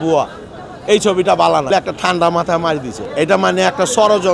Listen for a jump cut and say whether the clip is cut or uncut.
cut